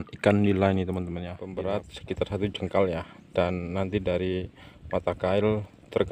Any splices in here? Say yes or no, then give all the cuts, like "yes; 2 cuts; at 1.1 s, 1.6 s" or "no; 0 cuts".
yes; 1 cut; at 1.4 s